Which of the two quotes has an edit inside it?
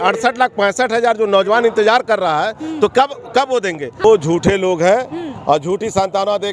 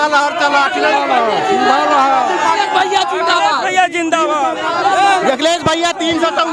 first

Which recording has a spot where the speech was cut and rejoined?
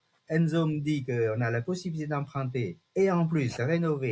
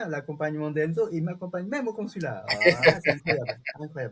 first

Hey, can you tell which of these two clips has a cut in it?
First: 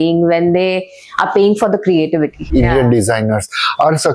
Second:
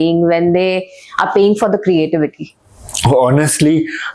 first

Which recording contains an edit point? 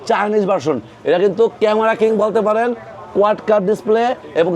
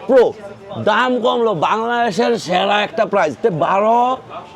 second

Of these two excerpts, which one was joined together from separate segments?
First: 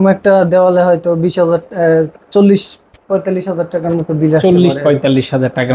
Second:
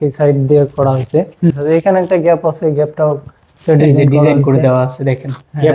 second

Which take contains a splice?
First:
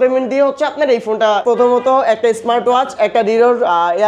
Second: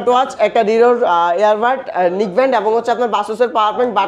first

